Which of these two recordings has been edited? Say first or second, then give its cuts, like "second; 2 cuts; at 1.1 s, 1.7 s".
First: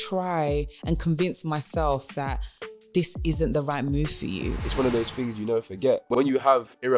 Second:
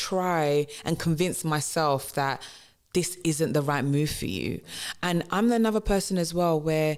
first; 2 cuts; at 4.6 s, 6.1 s